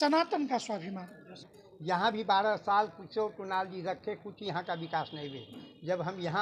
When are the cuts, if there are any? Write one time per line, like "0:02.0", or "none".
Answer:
0:01.3